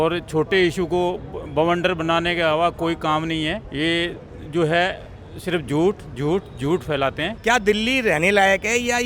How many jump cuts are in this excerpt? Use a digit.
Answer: 2